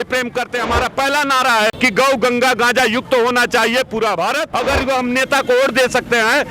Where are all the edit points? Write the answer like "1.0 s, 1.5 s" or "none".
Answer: 1.8 s, 4.5 s